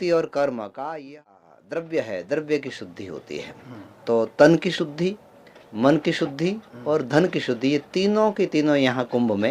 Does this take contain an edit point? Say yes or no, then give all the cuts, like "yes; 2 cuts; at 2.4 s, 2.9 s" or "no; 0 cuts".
yes; 1 cut; at 1.3 s